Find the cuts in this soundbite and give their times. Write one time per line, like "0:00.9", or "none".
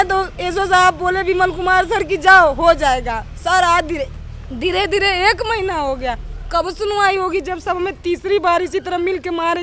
none